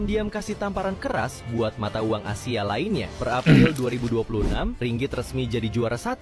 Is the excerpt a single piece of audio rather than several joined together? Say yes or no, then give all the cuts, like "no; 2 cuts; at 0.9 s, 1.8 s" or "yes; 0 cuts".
yes; 0 cuts